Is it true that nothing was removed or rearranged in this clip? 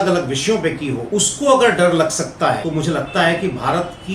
no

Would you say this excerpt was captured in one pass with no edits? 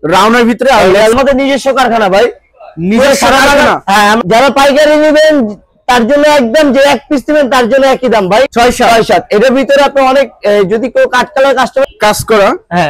no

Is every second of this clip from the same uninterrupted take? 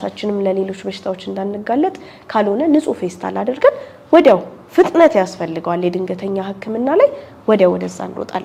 yes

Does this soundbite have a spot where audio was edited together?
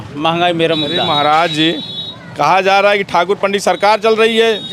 no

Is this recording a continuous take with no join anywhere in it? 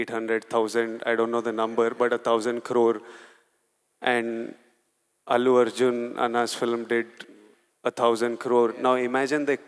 yes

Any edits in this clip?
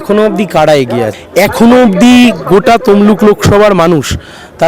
yes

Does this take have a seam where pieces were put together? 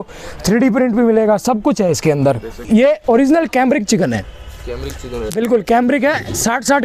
yes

